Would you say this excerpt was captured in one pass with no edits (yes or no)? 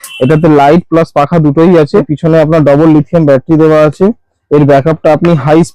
no